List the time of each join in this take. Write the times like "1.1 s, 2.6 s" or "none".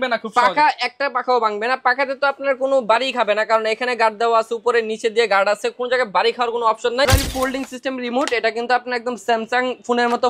7.1 s